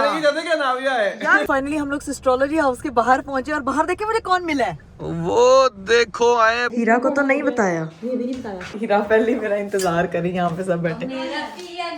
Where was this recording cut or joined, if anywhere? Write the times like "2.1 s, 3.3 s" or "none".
1.5 s, 6.6 s, 8.7 s